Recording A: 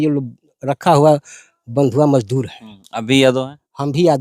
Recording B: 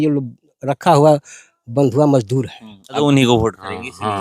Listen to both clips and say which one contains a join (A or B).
B